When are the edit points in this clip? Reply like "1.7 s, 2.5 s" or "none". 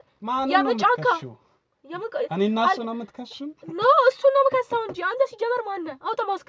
none